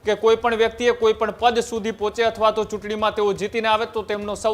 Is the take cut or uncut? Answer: uncut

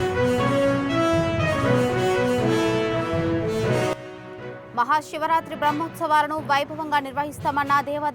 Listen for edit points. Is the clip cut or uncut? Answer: cut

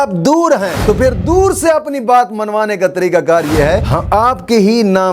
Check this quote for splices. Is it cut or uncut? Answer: cut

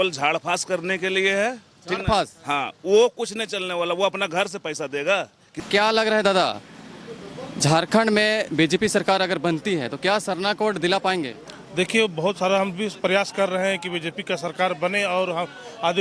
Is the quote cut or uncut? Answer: cut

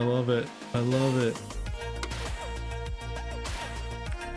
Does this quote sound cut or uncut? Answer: uncut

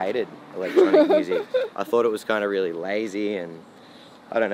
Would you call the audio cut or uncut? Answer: uncut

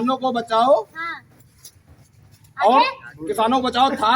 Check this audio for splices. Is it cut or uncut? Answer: uncut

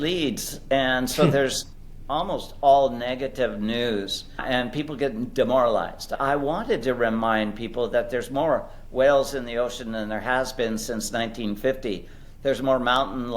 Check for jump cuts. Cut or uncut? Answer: cut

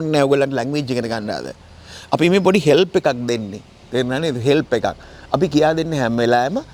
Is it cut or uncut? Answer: uncut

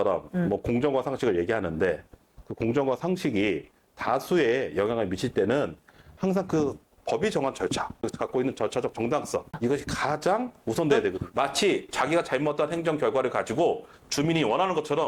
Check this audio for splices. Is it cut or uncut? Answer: cut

